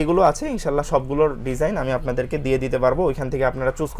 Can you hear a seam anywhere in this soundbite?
no; 0 cuts

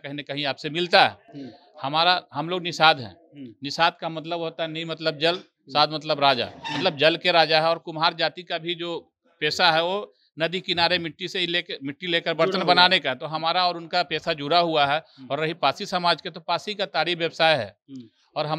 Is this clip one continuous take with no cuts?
yes; 0 cuts

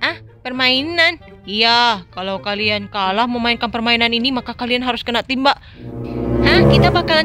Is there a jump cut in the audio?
no; 0 cuts

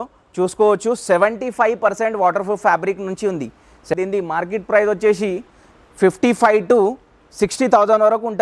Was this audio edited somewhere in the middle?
yes; 1 cut; at 3.8 s

